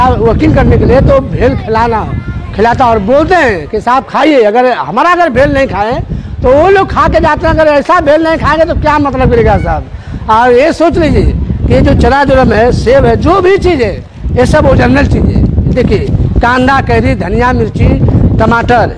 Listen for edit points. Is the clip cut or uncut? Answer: uncut